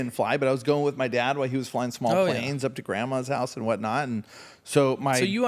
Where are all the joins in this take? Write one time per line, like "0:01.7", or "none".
none